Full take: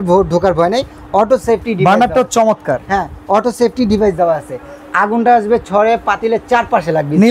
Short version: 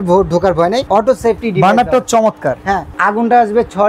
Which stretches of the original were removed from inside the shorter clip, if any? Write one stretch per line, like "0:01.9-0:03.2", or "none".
0:00.8-0:01.1
0:03.1-0:04.8

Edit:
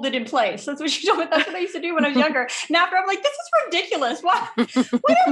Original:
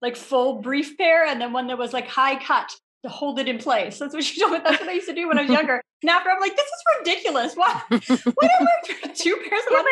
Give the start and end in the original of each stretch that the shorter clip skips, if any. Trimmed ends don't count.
none

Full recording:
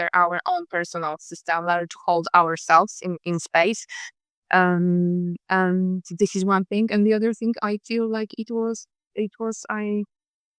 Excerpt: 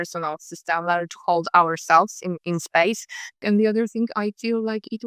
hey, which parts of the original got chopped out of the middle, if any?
0:04.2-0:06.9

